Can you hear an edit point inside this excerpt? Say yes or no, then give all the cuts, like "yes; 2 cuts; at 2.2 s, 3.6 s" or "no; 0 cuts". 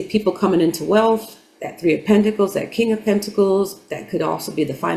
no; 0 cuts